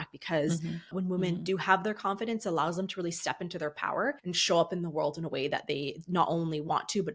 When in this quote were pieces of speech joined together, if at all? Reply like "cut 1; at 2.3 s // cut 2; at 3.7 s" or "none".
cut 1; at 0.9 s // cut 2; at 4.3 s